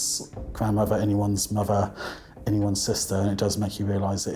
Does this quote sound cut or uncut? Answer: uncut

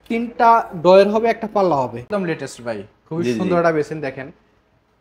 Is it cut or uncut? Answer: cut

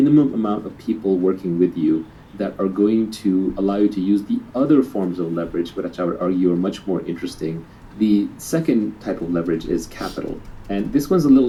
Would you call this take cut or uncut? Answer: uncut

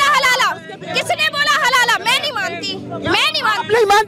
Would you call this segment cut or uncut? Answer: uncut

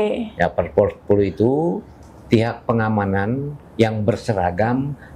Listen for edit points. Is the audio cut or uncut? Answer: uncut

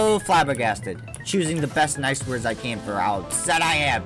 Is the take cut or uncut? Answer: uncut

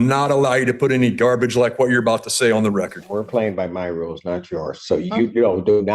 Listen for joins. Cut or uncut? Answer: cut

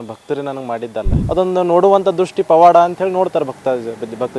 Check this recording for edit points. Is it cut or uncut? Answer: cut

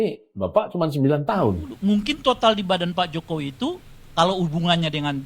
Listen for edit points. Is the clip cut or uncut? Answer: cut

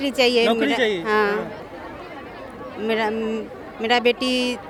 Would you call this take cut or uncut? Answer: uncut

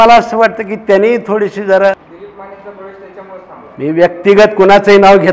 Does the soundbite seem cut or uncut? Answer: cut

